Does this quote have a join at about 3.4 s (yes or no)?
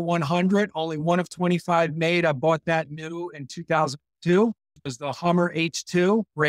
no